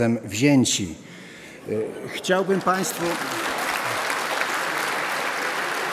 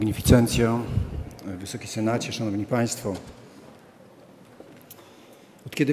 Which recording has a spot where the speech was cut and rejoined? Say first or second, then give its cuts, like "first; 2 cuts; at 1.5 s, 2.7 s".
first; 1 cut; at 2.0 s